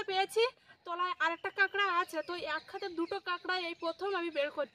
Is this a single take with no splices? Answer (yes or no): yes